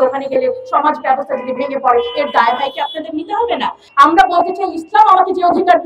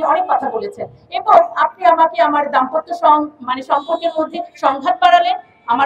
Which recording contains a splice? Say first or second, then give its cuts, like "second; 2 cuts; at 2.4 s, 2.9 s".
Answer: first; 1 cut; at 3.8 s